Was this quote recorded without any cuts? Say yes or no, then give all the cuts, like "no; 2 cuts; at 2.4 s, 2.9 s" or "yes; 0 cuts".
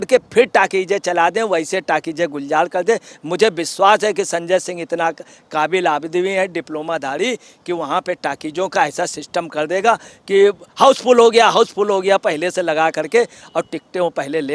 yes; 0 cuts